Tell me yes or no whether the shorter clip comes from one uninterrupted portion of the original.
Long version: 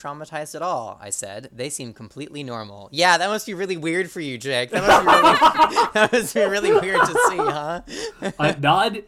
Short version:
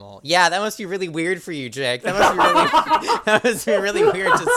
yes